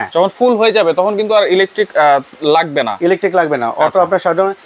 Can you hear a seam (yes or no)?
no